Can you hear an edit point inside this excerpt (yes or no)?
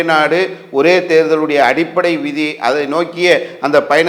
no